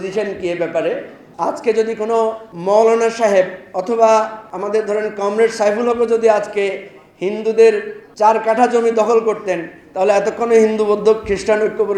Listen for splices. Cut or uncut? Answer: cut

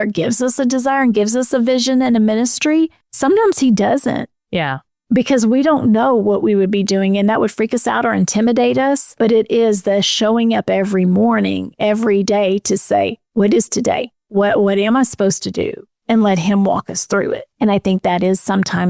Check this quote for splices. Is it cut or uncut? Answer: cut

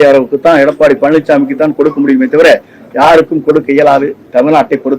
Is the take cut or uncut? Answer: uncut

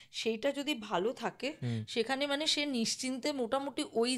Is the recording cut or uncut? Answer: uncut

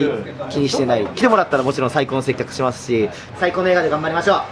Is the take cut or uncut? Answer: cut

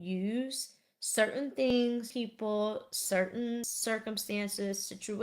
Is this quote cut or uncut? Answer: cut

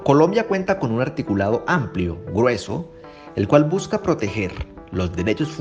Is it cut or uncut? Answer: uncut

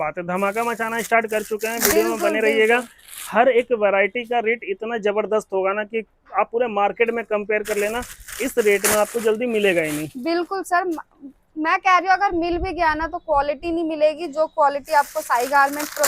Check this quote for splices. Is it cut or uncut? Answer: uncut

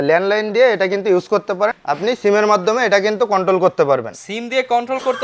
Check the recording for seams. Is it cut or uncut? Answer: cut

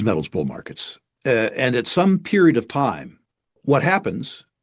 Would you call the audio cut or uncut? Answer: cut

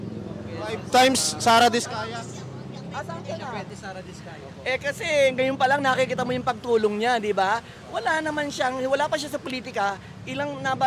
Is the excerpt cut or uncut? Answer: cut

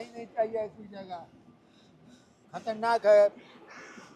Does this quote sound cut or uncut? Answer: uncut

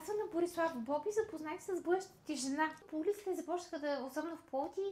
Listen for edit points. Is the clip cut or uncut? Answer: cut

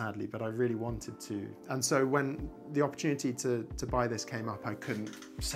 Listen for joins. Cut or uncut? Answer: cut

